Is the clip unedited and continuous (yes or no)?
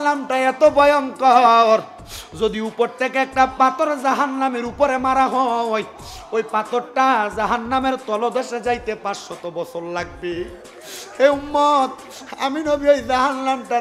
yes